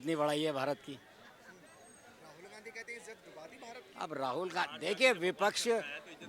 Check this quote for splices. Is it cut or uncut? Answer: uncut